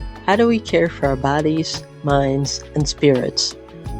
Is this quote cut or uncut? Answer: uncut